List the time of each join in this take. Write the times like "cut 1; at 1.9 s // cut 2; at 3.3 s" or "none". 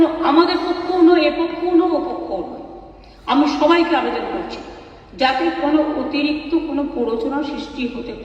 none